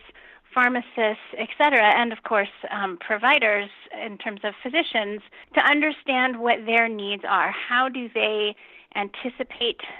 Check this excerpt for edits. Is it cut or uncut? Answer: cut